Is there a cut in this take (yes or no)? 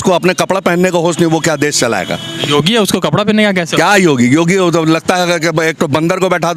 no